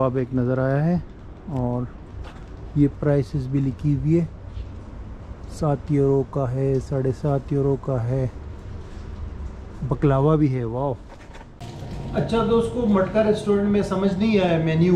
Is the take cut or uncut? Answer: uncut